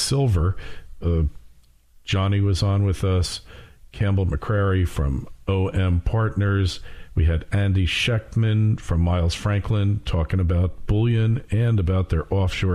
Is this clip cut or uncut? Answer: cut